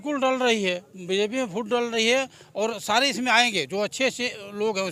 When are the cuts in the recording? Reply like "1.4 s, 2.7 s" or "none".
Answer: none